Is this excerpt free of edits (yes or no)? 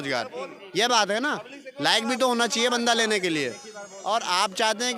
yes